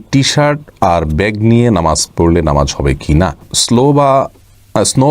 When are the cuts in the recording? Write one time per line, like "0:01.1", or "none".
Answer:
0:03.5